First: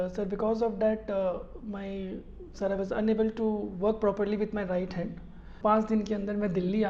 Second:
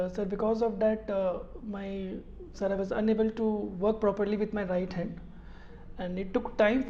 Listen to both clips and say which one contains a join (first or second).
first